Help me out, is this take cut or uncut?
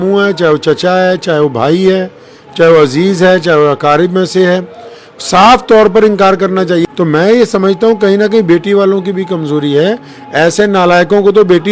cut